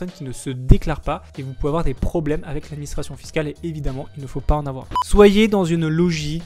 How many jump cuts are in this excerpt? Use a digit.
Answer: 1